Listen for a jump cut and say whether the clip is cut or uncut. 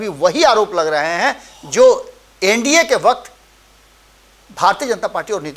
uncut